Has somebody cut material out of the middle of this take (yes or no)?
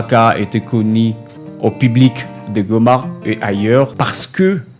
no